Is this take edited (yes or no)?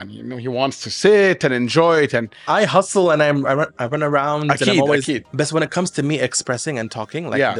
yes